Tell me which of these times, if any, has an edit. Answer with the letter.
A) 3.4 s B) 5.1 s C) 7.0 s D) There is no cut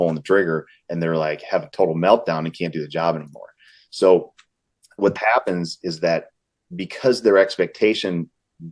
B